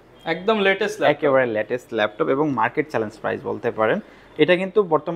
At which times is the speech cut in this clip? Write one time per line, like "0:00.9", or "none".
none